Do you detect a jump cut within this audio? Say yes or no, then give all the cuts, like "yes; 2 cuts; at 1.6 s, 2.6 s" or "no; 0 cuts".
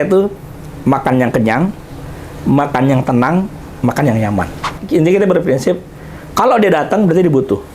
yes; 1 cut; at 4.8 s